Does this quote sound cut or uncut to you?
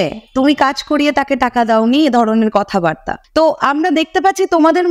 cut